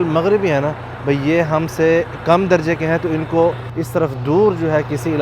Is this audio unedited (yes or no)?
no